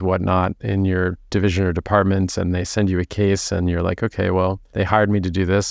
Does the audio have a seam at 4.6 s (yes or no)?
yes